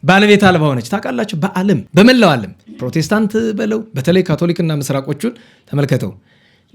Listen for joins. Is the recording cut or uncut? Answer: cut